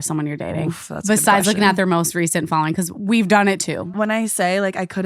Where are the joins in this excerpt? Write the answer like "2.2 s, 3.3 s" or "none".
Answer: 3.9 s